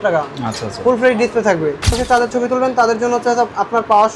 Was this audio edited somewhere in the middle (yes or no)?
yes